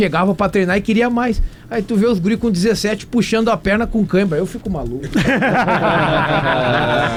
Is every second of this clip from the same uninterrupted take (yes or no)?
yes